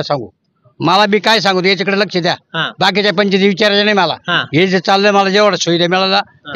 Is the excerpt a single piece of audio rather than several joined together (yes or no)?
yes